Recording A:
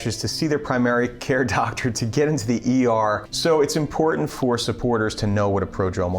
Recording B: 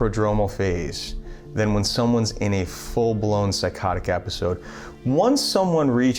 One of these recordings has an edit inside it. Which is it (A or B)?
A